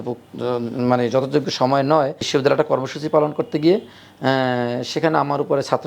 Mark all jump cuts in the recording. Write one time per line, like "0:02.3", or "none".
0:02.2